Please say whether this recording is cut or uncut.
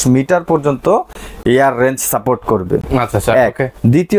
uncut